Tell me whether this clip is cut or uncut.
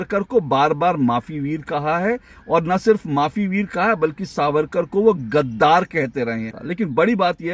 cut